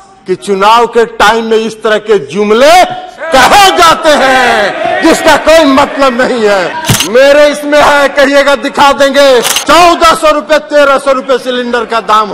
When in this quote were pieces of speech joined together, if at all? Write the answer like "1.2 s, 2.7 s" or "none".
6.8 s, 9.6 s